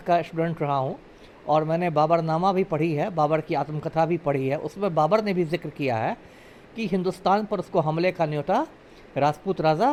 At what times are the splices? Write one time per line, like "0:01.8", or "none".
none